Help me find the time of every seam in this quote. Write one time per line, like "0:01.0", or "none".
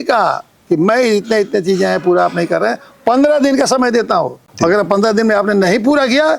none